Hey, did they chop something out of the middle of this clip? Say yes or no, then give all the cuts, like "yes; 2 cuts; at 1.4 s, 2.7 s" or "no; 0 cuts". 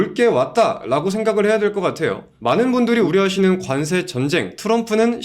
yes; 2 cuts; at 2.3 s, 3.1 s